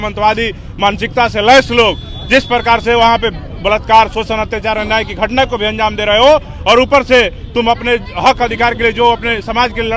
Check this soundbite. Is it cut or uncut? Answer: uncut